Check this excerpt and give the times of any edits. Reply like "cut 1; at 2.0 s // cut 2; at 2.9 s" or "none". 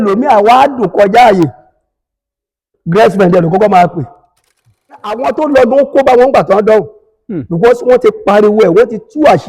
cut 1; at 5.1 s